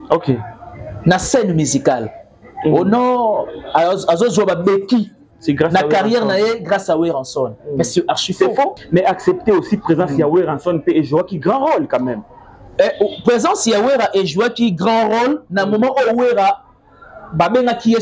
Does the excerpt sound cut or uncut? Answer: cut